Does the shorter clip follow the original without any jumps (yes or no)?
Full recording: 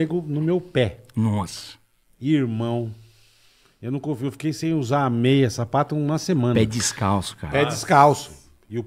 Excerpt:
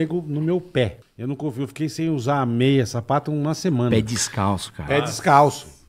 no